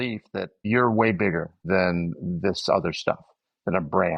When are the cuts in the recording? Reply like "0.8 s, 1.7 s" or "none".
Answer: none